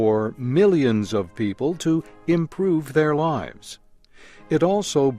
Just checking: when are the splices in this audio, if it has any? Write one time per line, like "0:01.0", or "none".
0:02.1